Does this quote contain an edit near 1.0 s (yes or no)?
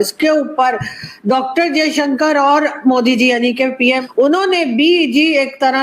no